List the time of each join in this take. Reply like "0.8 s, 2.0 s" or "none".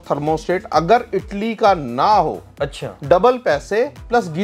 none